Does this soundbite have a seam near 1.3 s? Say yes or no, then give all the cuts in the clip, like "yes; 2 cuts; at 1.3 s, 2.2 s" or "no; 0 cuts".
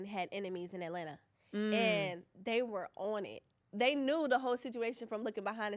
no; 0 cuts